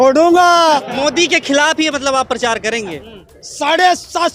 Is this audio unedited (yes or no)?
no